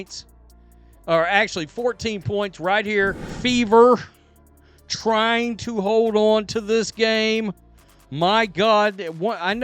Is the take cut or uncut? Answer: cut